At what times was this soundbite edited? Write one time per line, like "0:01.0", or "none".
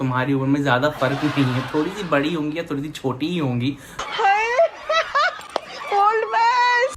none